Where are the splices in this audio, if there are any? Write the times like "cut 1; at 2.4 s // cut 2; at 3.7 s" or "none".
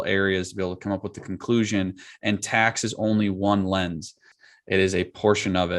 cut 1; at 4.3 s